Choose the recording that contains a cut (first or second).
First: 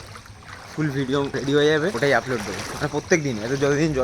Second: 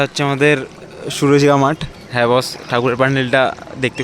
first